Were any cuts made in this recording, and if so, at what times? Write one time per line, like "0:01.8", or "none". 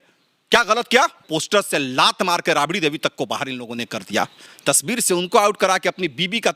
0:01.3
0:04.4